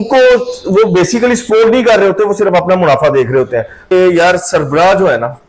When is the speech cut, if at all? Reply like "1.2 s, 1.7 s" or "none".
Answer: 3.9 s